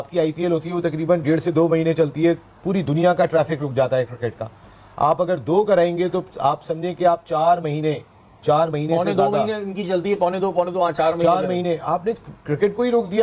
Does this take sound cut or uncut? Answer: uncut